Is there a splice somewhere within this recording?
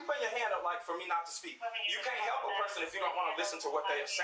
no; 0 cuts

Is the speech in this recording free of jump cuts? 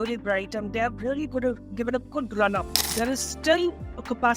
no; 1 cut; at 2.9 s

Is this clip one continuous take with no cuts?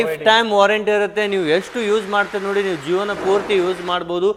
yes; 0 cuts

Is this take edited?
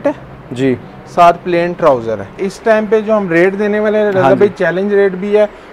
yes; 1 cut; at 2.3 s

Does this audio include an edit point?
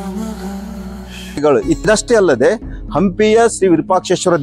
yes; 1 cut; at 1.4 s

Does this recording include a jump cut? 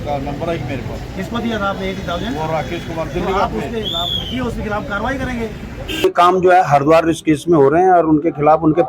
yes; 1 cut; at 6.0 s

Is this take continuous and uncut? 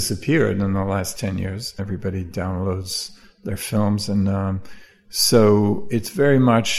no; 2 cuts; at 1.8 s, 5.8 s

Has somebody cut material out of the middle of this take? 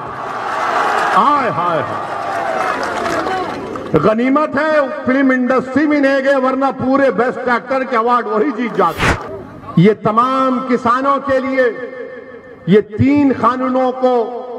yes; 1 cut; at 9.2 s

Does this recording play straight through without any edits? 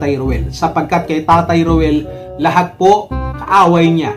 yes; 0 cuts

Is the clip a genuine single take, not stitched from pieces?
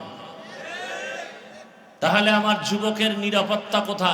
no; 1 cut; at 1.8 s

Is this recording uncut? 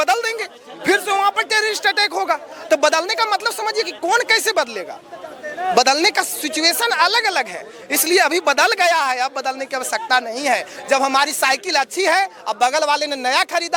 yes; 0 cuts

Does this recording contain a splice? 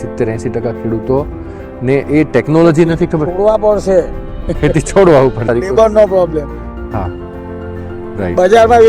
yes; 1 cut; at 5.4 s

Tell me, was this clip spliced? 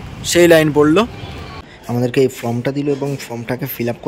yes; 1 cut; at 1.6 s

